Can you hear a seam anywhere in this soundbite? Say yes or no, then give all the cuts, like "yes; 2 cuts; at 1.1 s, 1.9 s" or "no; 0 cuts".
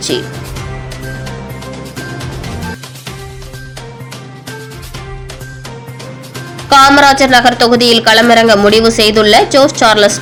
no; 0 cuts